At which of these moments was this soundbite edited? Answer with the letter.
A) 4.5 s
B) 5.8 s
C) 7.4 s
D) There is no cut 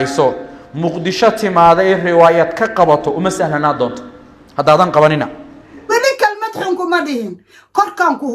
B